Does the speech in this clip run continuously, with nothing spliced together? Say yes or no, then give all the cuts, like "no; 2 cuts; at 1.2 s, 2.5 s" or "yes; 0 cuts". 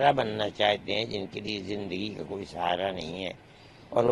yes; 0 cuts